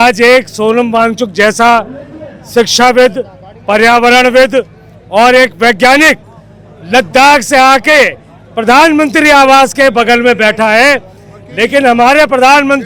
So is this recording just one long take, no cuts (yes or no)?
yes